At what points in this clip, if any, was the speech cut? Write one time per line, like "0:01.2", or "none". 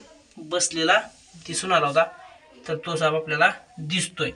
none